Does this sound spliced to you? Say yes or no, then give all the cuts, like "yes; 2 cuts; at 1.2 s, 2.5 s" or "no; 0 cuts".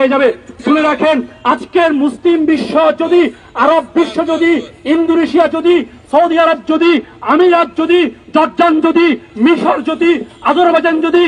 no; 0 cuts